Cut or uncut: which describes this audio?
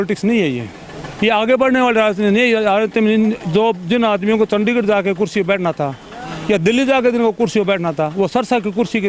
uncut